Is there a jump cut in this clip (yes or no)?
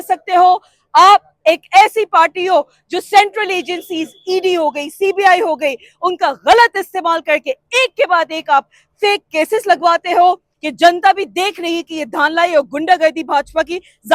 yes